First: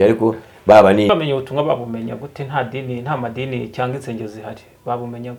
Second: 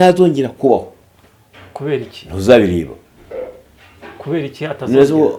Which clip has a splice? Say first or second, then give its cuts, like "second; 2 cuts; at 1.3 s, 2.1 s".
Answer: first; 1 cut; at 1.1 s